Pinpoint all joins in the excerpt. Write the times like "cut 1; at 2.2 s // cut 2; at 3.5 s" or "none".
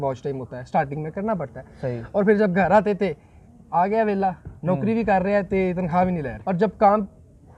cut 1; at 6.4 s